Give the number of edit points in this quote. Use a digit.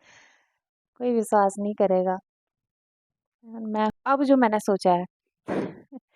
1